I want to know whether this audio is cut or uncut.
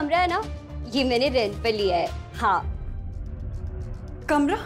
uncut